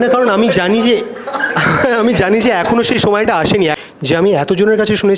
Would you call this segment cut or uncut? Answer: cut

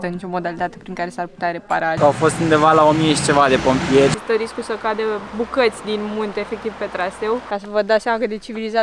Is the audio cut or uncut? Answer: cut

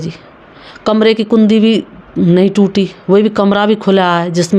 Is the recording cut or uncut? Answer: uncut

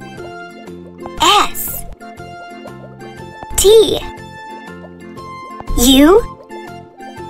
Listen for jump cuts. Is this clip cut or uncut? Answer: uncut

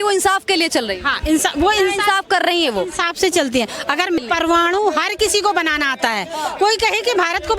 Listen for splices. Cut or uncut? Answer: cut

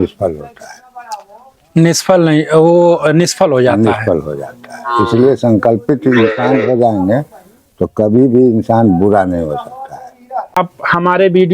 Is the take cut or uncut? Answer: cut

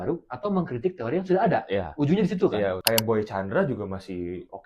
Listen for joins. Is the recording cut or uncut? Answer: cut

